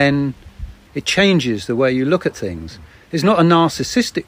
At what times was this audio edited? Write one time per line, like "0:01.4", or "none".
none